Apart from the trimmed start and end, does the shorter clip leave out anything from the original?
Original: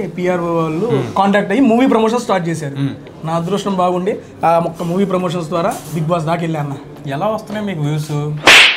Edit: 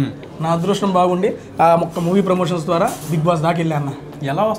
no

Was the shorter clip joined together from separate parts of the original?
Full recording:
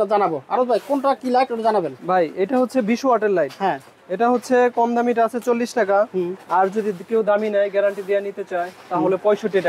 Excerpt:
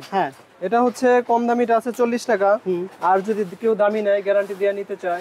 no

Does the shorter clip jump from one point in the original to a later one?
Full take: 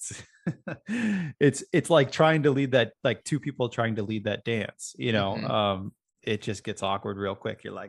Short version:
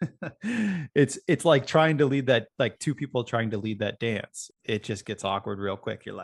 yes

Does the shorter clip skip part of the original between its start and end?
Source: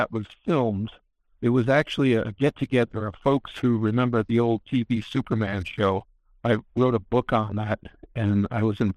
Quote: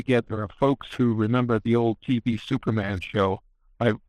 no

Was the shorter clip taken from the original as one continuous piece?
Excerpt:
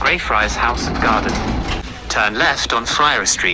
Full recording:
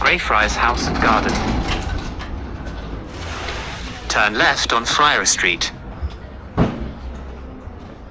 no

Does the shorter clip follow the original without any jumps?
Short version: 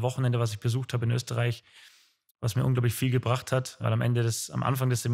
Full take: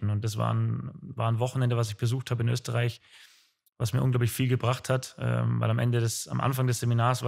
no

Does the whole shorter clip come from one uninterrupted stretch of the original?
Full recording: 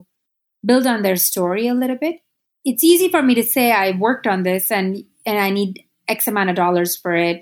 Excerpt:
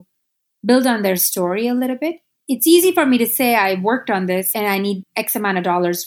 no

